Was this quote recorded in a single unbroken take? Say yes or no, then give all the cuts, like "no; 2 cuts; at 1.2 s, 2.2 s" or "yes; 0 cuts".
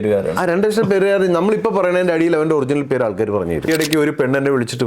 no; 1 cut; at 3.7 s